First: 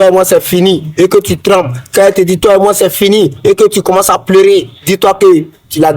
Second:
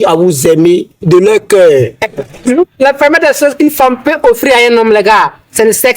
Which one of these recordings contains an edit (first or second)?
second